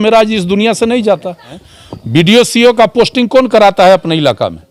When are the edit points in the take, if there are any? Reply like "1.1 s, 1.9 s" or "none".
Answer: 1.6 s

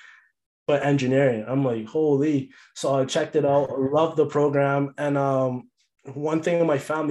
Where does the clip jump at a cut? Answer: none

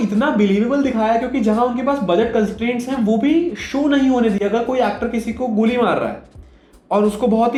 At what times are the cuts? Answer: none

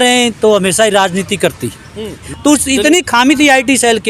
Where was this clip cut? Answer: 2.2 s

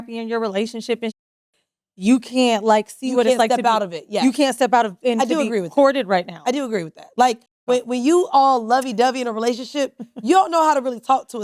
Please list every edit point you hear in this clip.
none

